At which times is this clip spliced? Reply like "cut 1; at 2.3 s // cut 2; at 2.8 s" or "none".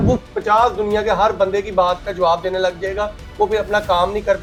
none